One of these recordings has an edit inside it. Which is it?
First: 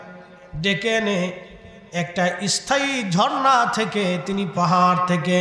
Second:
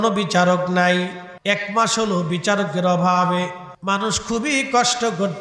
second; 2 cuts; at 1.3 s, 3.7 s

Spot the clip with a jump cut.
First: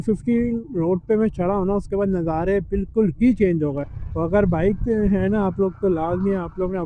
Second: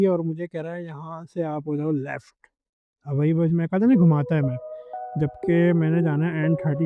first; 1 cut; at 3.8 s

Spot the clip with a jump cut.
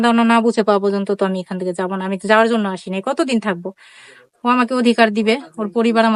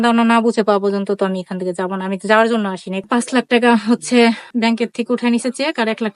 second; 2 cuts; at 3.0 s, 4.5 s

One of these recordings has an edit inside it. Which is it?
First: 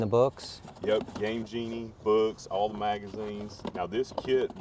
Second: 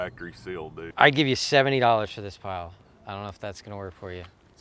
second; 1 cut; at 0.9 s

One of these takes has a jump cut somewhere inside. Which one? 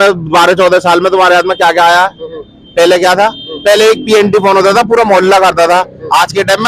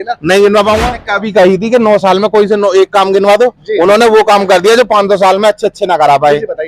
second; 1 cut; at 0.9 s

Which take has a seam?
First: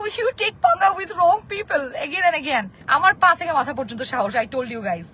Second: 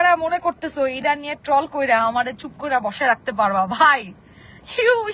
first; 1 cut; at 2.8 s

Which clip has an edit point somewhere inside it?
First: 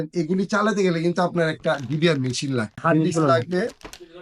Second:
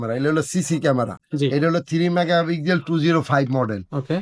first; 1 cut; at 2.8 s

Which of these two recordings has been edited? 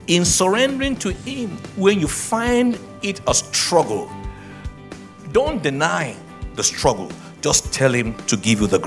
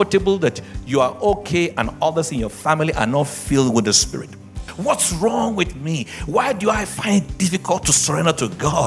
second; 1 cut; at 4.7 s

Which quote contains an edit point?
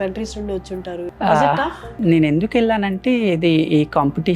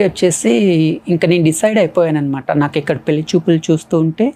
first; 2 cuts; at 1.0 s, 1.9 s

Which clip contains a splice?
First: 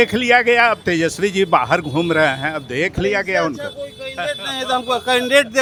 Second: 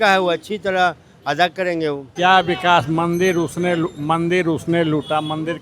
second; 1 cut; at 2.1 s

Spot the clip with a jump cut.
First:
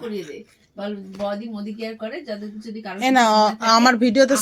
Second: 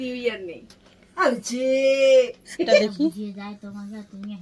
second; 1 cut; at 2.8 s

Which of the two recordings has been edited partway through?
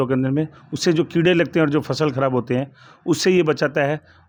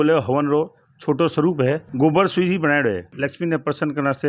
second; 2 cuts; at 1.9 s, 3.1 s

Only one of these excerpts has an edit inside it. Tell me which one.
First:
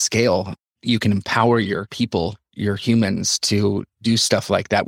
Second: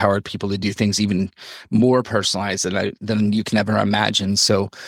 first; 1 cut; at 2.4 s

